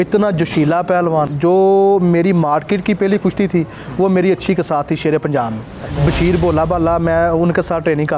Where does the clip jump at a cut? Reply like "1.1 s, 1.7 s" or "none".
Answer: 1.3 s, 5.9 s